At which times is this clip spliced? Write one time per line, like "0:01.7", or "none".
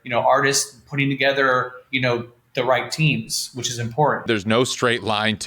0:04.2